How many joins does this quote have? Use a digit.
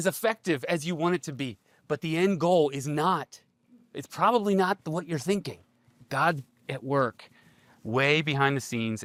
0